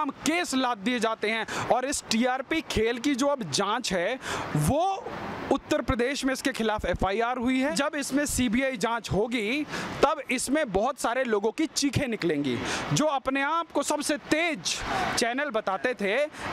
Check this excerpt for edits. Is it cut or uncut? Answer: cut